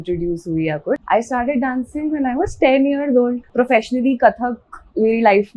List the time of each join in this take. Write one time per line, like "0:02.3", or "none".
0:01.0
0:03.4